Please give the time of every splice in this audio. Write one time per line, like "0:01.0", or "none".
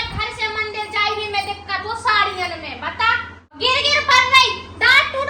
none